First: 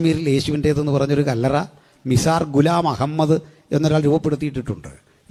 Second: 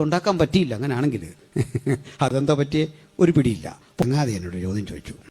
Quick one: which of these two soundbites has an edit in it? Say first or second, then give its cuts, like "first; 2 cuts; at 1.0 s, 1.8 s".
second; 1 cut; at 4.0 s